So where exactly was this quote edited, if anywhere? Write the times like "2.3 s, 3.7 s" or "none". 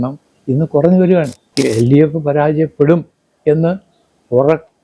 1.4 s